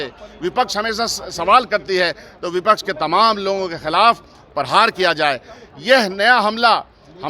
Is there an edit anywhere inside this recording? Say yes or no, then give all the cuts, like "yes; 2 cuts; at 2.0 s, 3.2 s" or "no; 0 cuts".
no; 0 cuts